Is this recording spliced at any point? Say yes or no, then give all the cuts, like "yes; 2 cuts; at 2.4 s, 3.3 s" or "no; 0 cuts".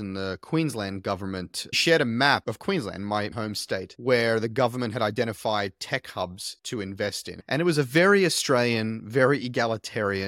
yes; 2 cuts; at 1.8 s, 7.3 s